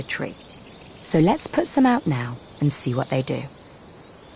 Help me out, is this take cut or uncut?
uncut